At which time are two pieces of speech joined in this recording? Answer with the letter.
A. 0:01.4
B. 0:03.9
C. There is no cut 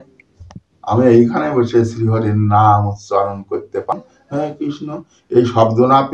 B